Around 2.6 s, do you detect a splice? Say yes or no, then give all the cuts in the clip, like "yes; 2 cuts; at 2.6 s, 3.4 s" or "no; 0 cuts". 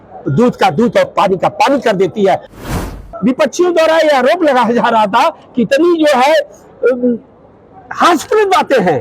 yes; 1 cut; at 2.6 s